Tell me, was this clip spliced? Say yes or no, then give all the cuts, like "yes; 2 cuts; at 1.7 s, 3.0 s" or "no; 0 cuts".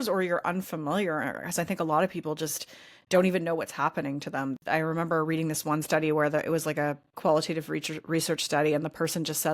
yes; 1 cut; at 4.5 s